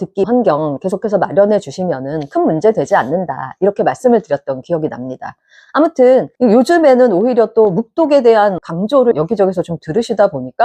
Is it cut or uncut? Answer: uncut